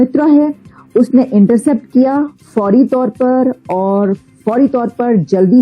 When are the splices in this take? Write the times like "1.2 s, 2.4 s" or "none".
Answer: none